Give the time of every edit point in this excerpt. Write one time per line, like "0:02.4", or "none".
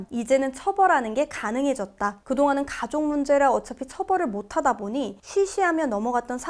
0:02.2